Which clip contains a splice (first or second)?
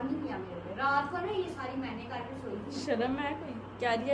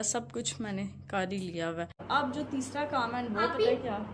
second